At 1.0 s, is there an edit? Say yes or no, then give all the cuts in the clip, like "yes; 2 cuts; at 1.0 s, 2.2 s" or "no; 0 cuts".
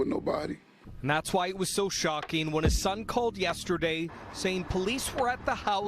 no; 0 cuts